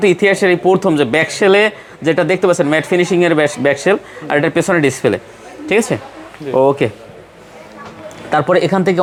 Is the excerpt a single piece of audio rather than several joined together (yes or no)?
yes